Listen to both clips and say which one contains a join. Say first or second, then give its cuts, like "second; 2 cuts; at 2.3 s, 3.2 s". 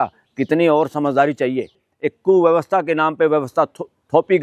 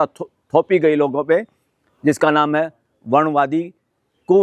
first; 1 cut; at 1.8 s